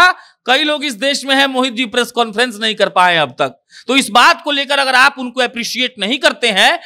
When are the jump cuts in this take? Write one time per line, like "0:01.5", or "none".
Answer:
none